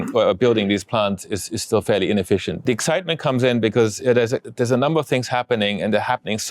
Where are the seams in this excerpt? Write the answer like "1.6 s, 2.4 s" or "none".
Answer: 2.6 s